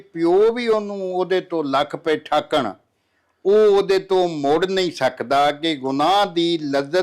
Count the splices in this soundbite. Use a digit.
0